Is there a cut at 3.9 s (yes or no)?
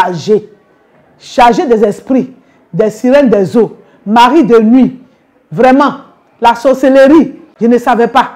no